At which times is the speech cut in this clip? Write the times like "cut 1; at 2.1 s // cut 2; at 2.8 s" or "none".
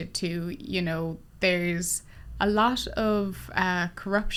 none

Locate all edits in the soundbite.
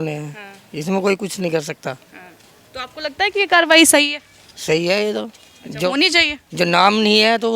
none

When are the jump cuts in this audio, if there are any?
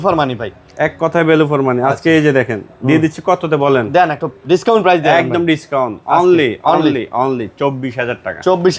none

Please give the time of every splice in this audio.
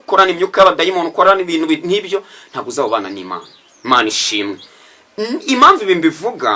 none

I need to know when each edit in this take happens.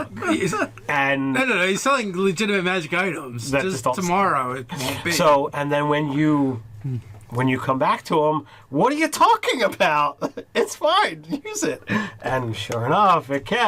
none

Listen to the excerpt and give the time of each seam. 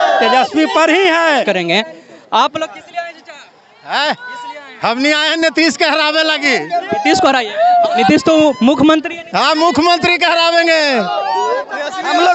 cut 1; at 1.4 s // cut 2; at 11.6 s

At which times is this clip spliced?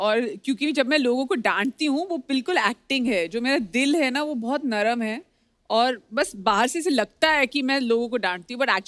none

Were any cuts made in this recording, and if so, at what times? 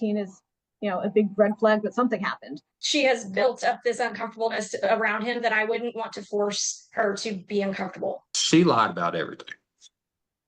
cut 1; at 2.8 s // cut 2; at 8.3 s

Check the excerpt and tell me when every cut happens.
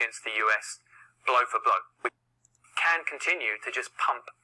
cut 1; at 2.2 s

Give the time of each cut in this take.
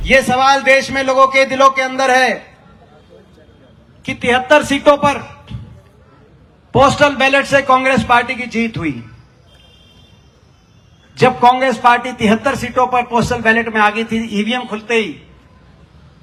none

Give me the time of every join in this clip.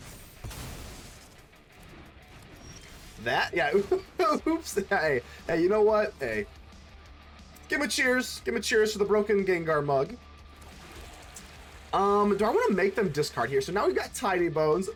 none

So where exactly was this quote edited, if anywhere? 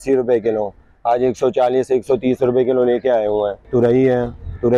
cut 1; at 3.6 s

